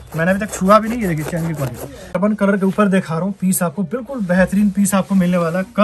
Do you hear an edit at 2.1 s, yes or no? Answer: yes